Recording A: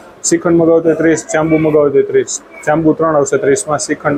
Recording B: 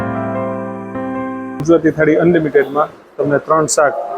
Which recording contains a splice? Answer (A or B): B